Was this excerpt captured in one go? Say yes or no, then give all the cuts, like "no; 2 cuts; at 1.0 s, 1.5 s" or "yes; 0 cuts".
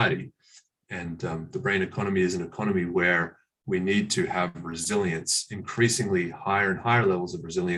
yes; 0 cuts